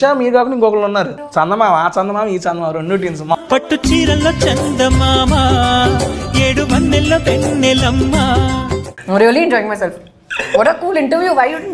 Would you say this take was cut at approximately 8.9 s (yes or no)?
yes